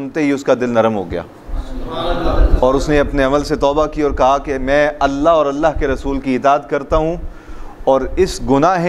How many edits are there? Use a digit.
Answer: 0